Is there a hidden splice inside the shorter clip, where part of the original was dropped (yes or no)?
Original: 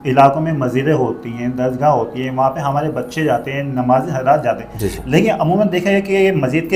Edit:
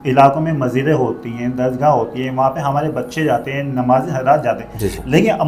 no